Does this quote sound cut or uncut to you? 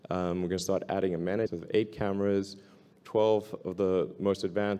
uncut